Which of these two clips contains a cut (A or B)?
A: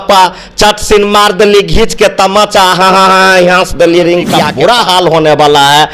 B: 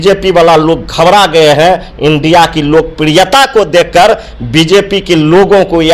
A